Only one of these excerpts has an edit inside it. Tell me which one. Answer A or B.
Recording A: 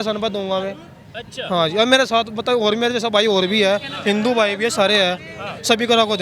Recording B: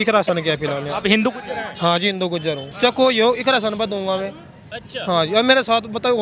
B